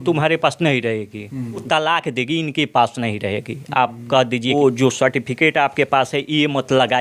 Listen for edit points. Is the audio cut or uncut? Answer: cut